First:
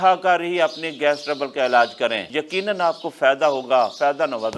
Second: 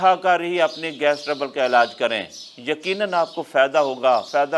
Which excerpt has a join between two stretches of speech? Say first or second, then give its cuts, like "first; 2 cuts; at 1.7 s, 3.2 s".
first; 1 cut; at 2.2 s